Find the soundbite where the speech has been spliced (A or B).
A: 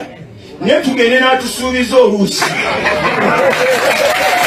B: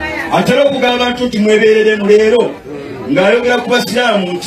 B